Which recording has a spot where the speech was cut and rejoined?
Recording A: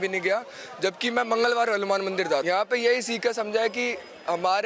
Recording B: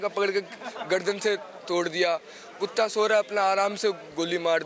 A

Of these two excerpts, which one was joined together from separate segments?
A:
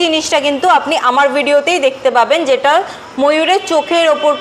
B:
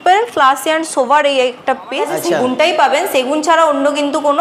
B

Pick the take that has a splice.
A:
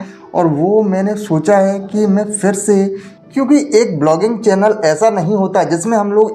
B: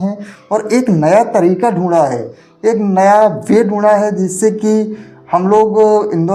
A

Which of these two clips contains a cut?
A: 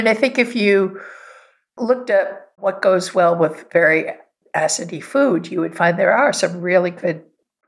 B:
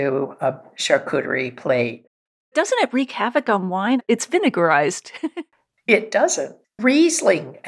B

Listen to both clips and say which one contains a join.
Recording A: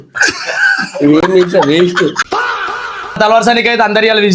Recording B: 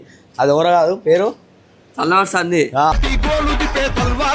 A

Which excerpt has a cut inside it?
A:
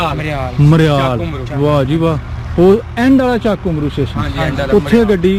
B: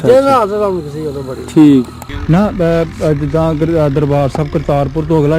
B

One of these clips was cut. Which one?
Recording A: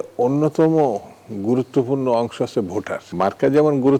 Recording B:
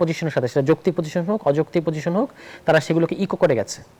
A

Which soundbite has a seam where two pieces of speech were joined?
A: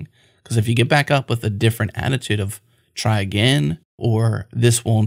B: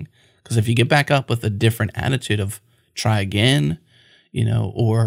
A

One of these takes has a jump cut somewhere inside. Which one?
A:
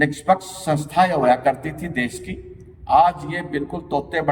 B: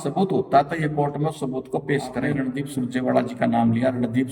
B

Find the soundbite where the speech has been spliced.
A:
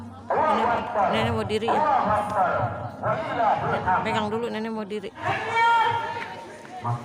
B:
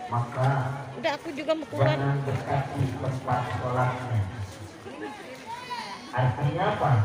A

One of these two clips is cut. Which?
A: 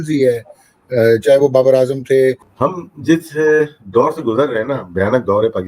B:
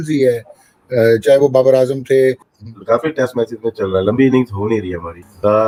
A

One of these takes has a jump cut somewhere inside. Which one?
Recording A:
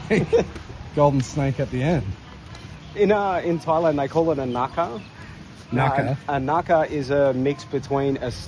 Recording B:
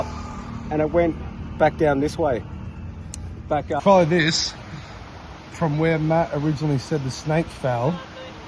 B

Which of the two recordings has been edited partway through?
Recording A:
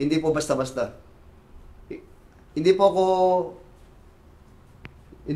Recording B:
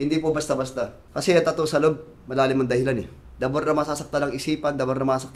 B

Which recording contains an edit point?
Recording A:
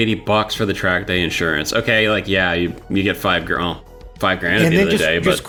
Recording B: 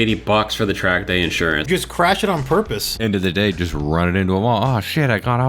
B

